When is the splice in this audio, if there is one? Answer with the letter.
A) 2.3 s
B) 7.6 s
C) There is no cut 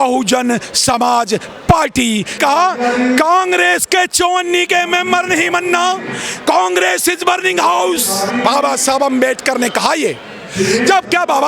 A